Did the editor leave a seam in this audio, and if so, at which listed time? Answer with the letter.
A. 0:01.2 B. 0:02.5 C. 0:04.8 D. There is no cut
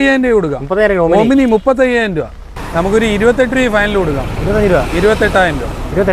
B